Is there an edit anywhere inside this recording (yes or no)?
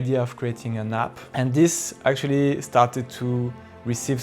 yes